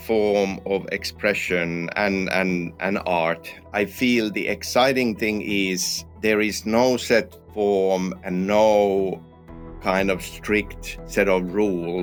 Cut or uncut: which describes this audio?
uncut